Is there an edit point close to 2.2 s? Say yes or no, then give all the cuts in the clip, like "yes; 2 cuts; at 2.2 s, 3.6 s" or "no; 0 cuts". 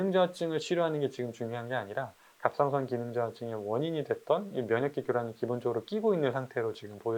no; 0 cuts